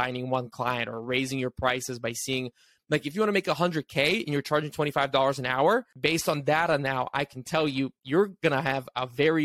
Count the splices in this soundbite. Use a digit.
1